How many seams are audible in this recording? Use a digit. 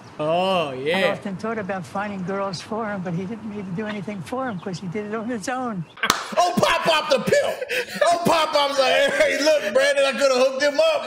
0